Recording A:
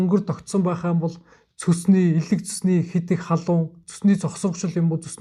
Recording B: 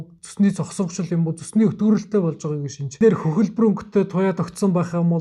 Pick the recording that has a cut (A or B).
B